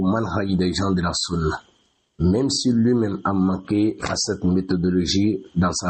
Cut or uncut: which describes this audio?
uncut